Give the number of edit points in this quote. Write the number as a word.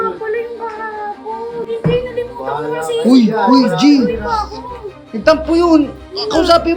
one